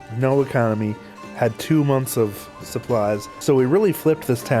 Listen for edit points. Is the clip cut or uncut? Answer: cut